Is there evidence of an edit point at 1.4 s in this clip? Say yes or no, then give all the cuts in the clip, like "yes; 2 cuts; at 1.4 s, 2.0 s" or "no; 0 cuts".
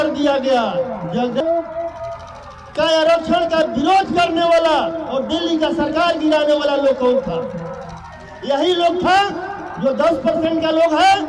yes; 1 cut; at 1.4 s